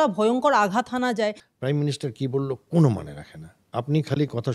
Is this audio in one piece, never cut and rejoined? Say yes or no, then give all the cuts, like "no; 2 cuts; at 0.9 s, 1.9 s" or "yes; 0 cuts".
no; 1 cut; at 1.4 s